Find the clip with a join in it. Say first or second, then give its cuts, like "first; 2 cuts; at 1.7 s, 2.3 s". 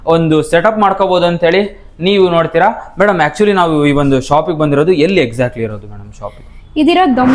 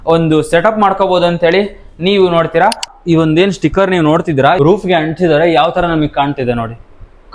second; 2 cuts; at 2.9 s, 4.6 s